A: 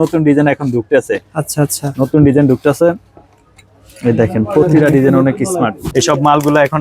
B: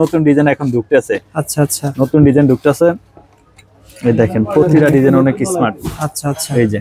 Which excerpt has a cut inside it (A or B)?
A